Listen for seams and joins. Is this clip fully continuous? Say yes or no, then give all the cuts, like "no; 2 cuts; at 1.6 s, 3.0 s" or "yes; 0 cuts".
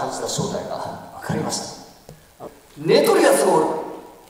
no; 1 cut; at 2.4 s